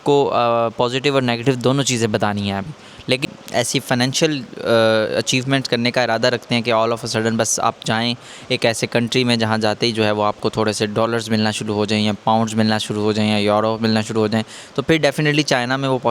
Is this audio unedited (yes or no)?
no